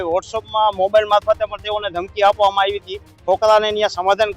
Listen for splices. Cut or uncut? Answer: cut